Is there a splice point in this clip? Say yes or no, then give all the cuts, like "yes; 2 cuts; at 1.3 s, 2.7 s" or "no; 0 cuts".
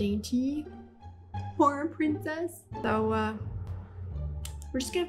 no; 0 cuts